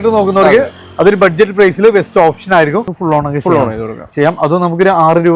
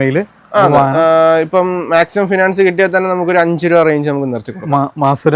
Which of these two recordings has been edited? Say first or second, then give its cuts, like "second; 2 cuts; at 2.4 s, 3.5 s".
first; 1 cut; at 2.9 s